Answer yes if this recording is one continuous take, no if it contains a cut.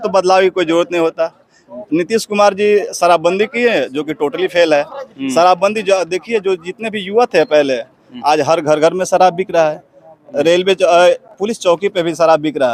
yes